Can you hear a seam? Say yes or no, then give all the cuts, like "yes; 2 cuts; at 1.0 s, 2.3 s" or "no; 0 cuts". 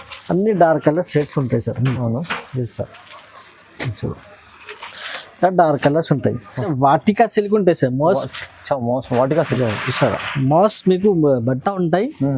yes; 1 cut; at 6.7 s